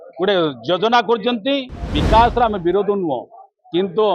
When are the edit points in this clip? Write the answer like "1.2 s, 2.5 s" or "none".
1.9 s